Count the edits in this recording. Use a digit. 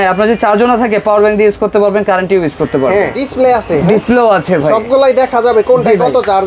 1